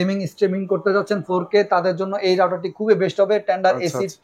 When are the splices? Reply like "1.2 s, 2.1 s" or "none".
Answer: none